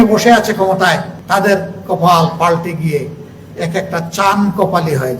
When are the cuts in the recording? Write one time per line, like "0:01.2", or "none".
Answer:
0:01.1

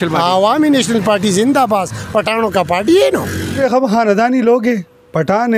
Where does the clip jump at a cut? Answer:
0:03.6

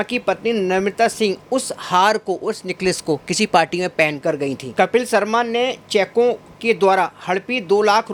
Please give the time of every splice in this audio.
none

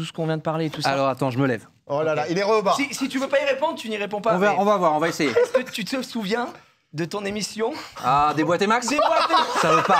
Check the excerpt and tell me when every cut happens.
none

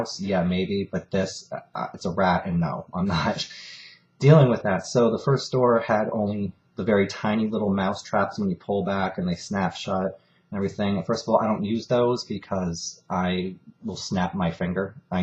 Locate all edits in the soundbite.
0:02.2

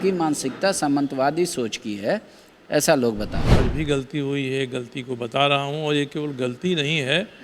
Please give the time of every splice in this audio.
0:03.4

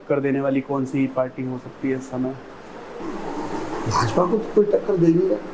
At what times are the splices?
none

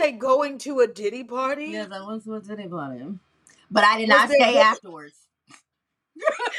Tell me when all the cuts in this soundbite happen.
none

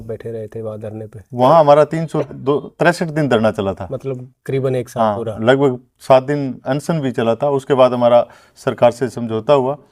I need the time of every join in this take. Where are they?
none

